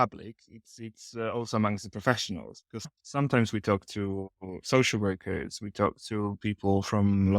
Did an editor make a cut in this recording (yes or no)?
yes